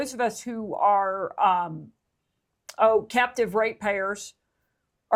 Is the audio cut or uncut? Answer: uncut